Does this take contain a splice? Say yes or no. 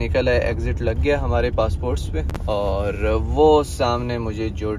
yes